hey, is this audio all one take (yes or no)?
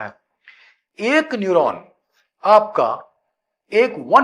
yes